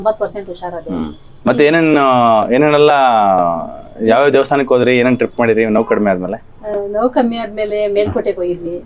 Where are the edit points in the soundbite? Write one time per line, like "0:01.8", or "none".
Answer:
none